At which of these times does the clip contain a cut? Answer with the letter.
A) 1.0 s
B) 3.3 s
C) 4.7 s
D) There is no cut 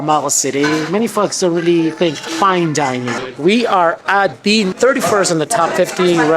B